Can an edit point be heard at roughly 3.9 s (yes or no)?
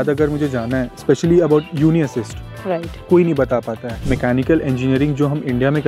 yes